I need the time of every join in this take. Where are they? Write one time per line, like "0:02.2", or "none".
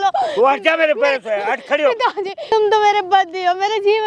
0:02.5